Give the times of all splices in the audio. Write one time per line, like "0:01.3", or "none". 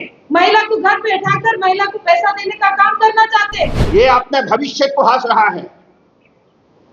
0:03.8